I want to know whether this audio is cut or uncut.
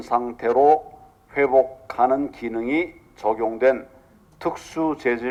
uncut